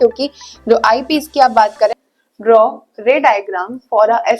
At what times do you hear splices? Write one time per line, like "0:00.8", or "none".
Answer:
0:02.0